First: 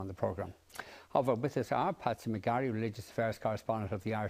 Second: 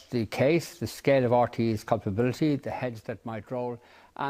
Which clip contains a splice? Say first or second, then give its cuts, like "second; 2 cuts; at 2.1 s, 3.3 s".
first; 1 cut; at 3.2 s